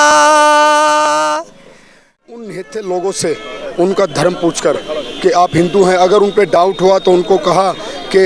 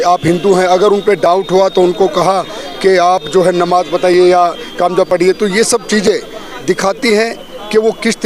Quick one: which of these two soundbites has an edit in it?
first; 1 cut; at 2.2 s

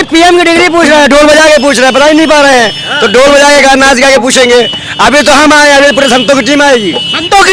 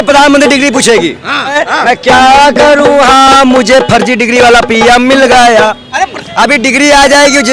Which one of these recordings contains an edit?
second; 2 cuts; at 1.6 s, 6.2 s

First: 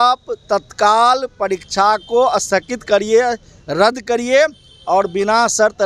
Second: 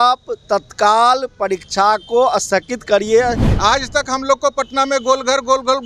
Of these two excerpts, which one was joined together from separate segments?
second; 1 cut; at 3.5 s

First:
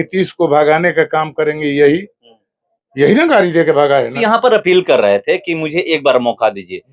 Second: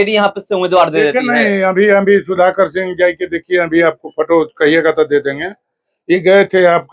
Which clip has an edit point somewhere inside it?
first; 1 cut; at 4.2 s

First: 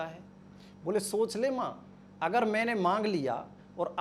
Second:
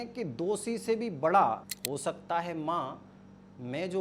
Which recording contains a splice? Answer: second; 1 cut; at 1.7 s

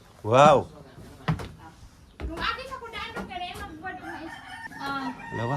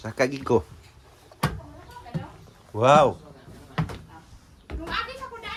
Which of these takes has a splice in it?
first; 1 cut; at 4.6 s

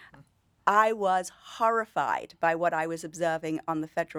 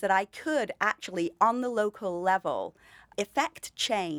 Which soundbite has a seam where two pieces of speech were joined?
second; 1 cut; at 3.1 s

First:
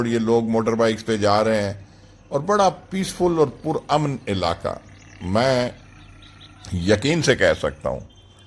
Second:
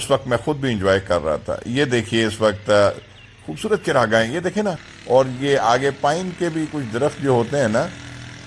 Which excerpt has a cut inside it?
second; 1 cut; at 4.9 s

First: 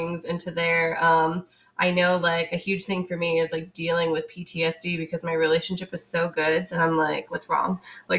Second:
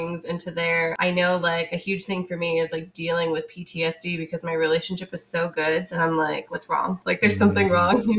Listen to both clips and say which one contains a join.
second; 2 cuts; at 0.9 s, 7.0 s

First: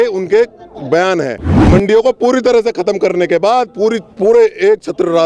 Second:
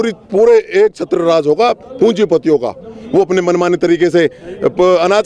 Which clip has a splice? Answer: first; 1 cut; at 1.5 s

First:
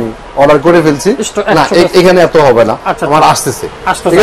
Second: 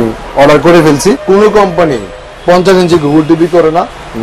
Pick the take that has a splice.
second; 1 cut; at 1.2 s

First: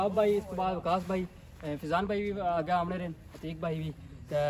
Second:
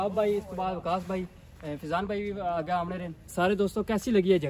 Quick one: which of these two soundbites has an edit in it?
second; 1 cut; at 3.3 s

